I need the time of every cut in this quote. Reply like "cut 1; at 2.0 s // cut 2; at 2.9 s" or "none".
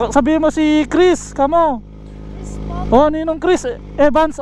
none